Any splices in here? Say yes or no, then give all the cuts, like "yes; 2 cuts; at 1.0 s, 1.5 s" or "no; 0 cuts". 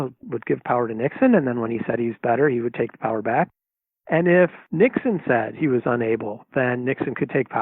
yes; 1 cut; at 4.6 s